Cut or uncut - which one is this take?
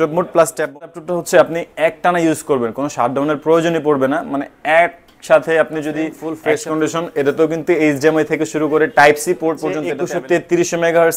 cut